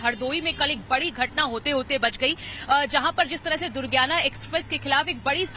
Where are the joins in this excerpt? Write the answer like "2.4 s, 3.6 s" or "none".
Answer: none